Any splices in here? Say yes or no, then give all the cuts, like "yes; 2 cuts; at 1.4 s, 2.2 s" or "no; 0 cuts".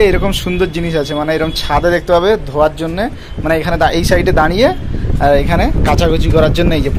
no; 0 cuts